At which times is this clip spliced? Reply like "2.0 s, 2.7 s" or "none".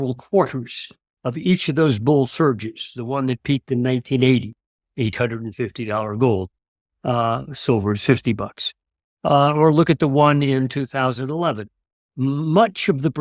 none